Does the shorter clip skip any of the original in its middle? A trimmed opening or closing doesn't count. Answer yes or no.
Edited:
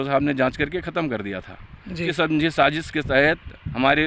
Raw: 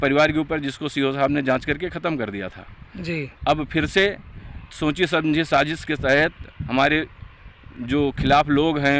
yes